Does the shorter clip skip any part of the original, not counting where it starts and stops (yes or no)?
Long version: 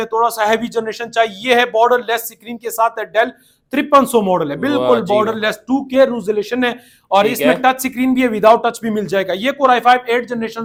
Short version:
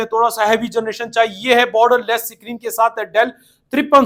no